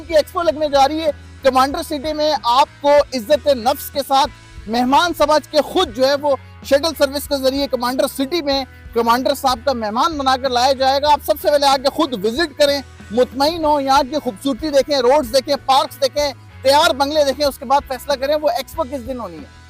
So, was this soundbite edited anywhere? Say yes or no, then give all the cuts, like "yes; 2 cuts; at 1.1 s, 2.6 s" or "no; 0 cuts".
no; 0 cuts